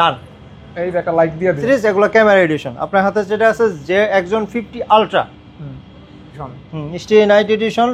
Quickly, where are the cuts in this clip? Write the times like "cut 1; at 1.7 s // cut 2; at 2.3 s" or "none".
cut 1; at 1.6 s // cut 2; at 6.3 s